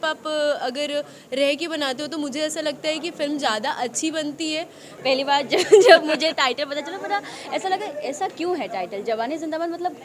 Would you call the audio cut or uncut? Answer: cut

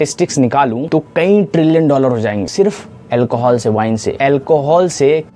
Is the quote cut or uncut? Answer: cut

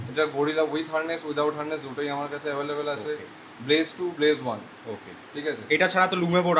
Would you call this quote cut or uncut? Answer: uncut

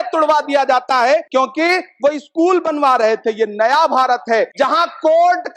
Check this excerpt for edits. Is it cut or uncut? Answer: cut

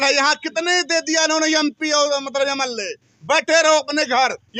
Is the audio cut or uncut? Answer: uncut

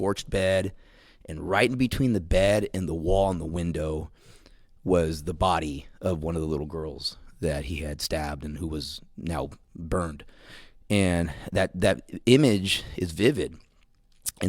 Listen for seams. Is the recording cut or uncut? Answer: cut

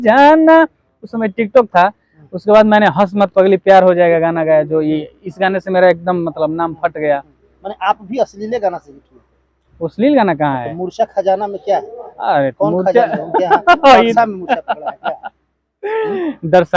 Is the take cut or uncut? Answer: uncut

